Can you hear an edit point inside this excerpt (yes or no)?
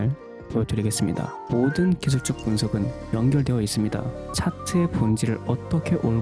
yes